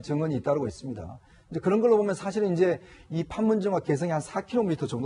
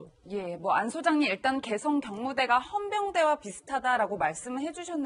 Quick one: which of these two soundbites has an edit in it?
first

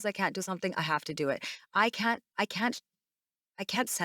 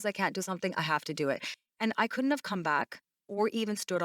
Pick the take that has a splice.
second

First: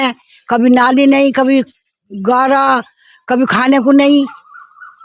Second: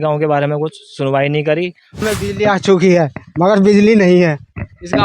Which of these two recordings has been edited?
second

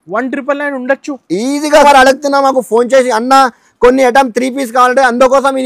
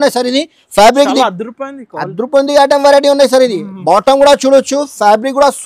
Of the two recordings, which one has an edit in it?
first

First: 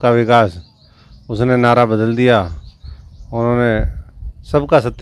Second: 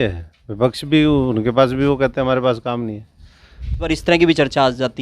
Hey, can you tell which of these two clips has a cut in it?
second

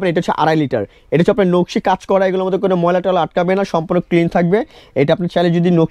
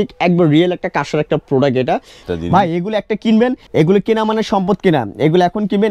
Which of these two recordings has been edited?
second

